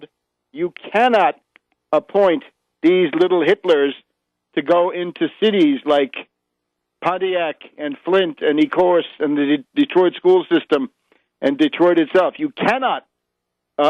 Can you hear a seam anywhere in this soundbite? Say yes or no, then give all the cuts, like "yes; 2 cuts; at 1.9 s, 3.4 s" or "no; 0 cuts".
yes; 1 cut; at 11.9 s